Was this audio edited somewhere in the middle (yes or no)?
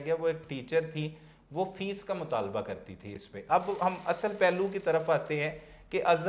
no